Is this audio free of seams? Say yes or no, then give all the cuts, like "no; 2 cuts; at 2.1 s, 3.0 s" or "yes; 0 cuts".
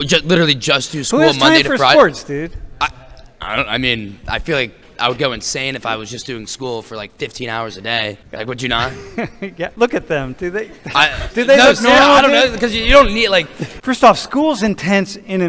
no; 3 cuts; at 8.2 s, 9.7 s, 13.7 s